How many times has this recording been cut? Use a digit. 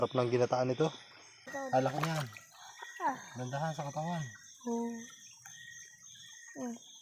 1